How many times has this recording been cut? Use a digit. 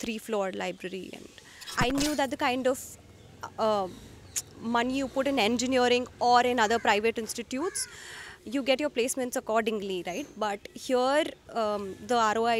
1